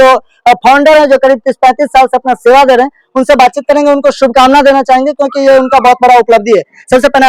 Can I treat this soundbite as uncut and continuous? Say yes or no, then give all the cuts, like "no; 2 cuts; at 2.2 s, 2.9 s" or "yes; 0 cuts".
yes; 0 cuts